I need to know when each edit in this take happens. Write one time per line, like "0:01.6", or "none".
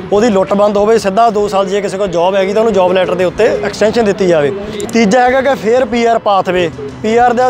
0:04.8